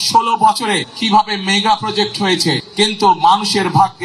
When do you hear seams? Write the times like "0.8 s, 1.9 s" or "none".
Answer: 0.9 s, 2.6 s